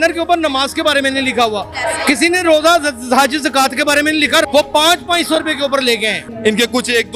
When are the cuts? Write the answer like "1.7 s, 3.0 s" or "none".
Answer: 4.5 s, 6.2 s